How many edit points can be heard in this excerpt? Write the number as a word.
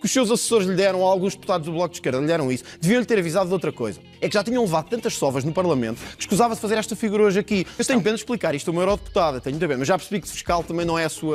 zero